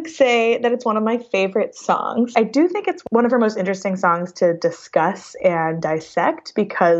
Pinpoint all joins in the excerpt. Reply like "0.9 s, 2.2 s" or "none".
2.7 s

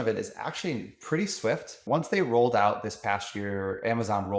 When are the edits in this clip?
1.8 s

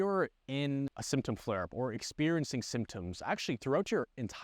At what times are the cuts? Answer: 1.0 s

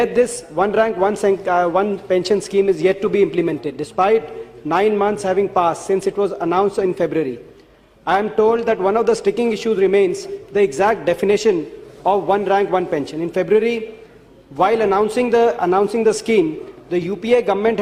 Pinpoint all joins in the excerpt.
none

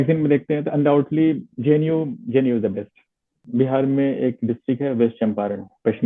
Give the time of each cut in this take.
3.3 s

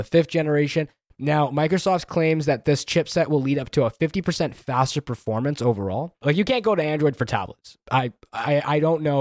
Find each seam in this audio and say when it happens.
1.0 s, 6.2 s

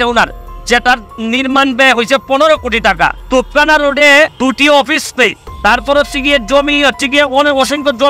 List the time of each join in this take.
3.2 s, 4.3 s, 5.5 s

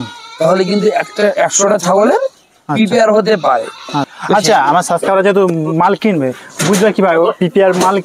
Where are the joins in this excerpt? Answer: 4.0 s

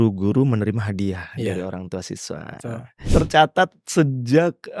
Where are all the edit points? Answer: 2.9 s

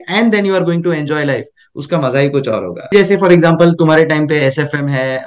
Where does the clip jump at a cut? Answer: 2.9 s

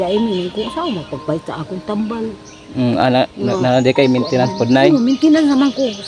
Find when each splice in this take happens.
none

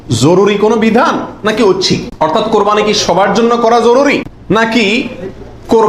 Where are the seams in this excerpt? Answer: 2.1 s, 4.3 s

